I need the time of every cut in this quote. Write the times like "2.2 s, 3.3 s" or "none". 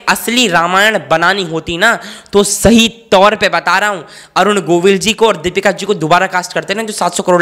none